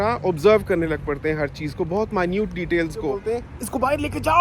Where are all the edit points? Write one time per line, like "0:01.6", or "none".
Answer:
0:03.2

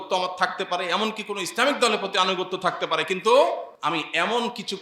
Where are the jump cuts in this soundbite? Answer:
0:03.7

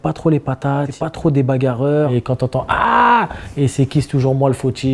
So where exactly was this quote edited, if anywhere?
0:00.9
0:02.2

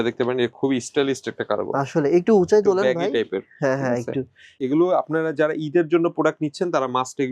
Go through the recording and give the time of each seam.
0:04.4

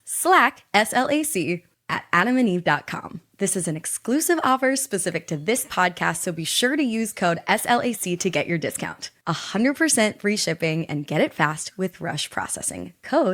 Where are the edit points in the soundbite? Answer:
none

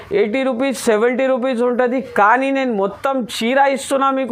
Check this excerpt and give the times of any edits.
none

